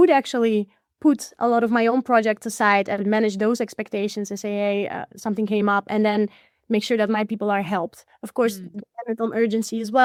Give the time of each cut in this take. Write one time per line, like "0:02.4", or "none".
none